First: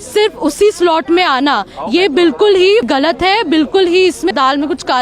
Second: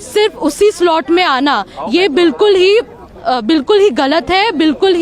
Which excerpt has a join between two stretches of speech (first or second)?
first